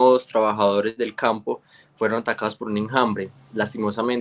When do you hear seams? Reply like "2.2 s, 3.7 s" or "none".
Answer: none